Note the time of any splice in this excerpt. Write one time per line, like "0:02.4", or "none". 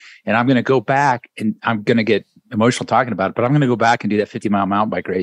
none